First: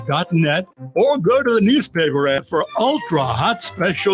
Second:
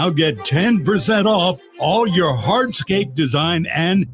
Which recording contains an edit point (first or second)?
first